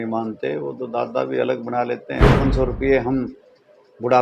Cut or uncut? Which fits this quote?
cut